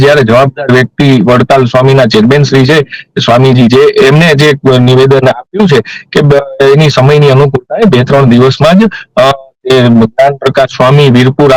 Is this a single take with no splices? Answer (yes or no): yes